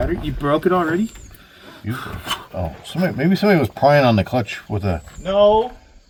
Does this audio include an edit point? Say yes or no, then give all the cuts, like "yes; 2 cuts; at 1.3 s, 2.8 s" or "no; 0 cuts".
no; 0 cuts